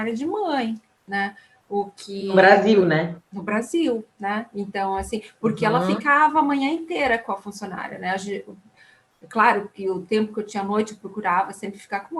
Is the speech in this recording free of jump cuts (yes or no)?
yes